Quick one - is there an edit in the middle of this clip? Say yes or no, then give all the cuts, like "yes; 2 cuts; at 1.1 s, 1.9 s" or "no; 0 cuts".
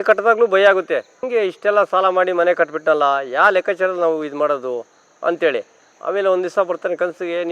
yes; 1 cut; at 1.2 s